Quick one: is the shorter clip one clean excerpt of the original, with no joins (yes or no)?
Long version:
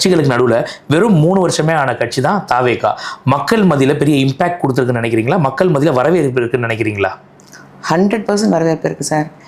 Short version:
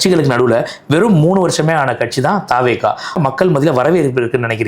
no